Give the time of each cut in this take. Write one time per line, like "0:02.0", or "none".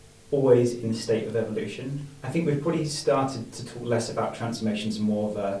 none

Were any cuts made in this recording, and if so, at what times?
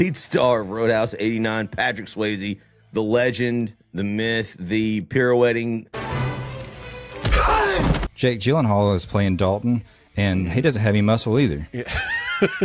0:06.0
0:08.1

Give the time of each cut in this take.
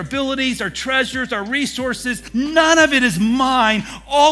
0:02.2

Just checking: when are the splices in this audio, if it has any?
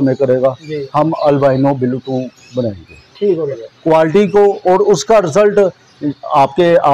0:03.5

